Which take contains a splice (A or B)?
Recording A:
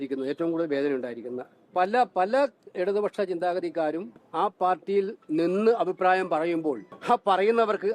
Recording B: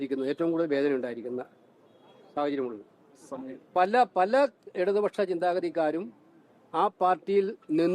A